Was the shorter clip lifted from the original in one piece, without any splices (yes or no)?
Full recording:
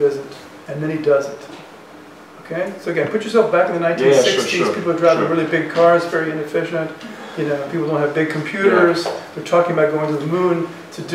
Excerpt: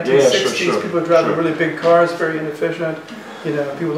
yes